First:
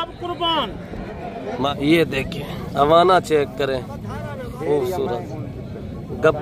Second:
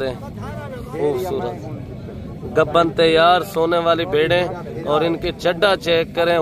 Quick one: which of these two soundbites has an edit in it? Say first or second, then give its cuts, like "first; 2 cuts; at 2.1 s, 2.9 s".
first; 1 cut; at 1.7 s